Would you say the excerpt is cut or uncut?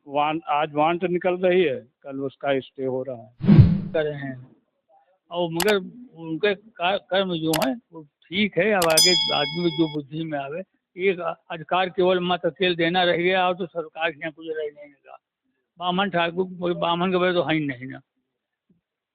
cut